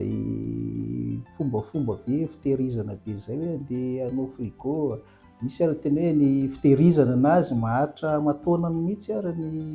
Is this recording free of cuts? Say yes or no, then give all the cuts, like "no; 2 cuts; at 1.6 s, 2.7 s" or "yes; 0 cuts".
yes; 0 cuts